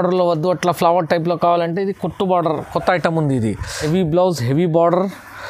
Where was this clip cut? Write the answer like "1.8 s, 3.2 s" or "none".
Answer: 3.7 s